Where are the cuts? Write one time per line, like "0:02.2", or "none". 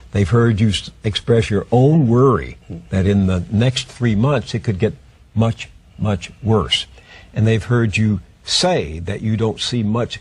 0:02.5